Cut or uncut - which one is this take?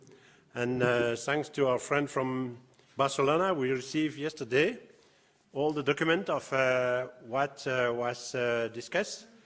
cut